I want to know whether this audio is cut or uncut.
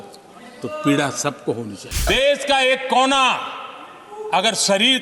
cut